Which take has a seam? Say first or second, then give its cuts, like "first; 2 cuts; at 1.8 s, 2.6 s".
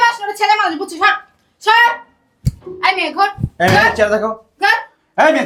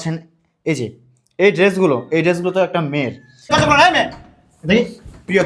second; 1 cut; at 3.5 s